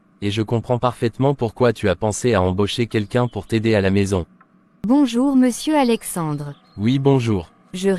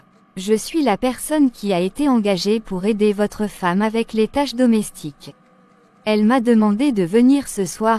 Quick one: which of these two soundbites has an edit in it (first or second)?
first